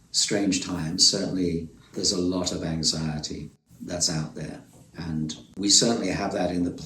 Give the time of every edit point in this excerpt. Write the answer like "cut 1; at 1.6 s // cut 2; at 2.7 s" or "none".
cut 1; at 1.8 s // cut 2; at 3.7 s // cut 3; at 5.4 s

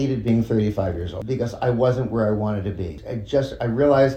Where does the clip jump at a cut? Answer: cut 1; at 1.1 s // cut 2; at 3.1 s

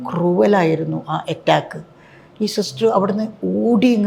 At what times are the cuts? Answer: none

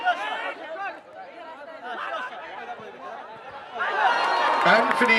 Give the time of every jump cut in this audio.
none

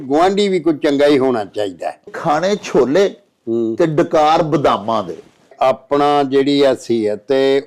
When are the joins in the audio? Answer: cut 1; at 2.1 s // cut 2; at 5.5 s

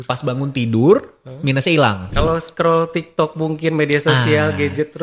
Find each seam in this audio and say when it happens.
cut 1; at 2.1 s

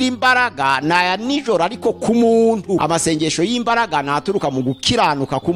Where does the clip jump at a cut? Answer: cut 1; at 2.8 s

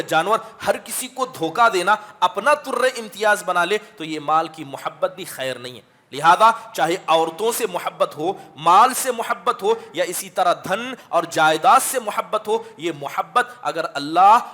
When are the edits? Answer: none

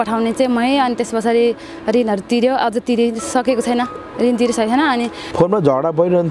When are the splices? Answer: cut 1; at 5.2 s

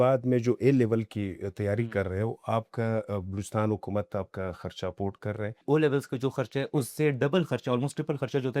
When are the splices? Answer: cut 1; at 5.6 s

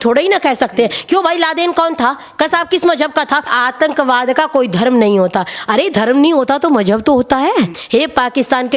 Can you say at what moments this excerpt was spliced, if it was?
cut 1; at 3.5 s // cut 2; at 7.8 s

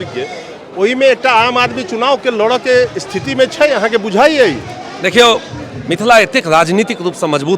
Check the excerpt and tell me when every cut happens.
none

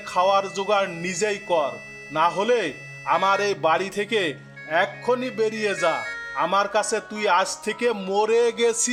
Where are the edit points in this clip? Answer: none

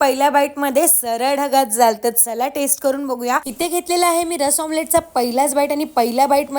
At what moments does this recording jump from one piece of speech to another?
cut 1; at 3.4 s

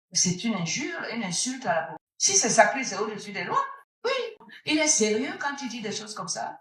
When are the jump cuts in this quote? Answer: cut 1; at 2.0 s // cut 2; at 4.5 s

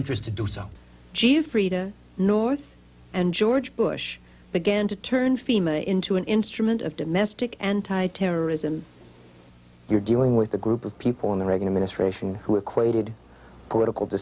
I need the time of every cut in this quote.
cut 1; at 2.7 s

